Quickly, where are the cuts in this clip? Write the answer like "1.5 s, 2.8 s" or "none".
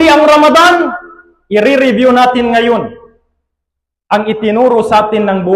none